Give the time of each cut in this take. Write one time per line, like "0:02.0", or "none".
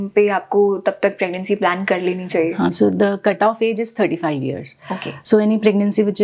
none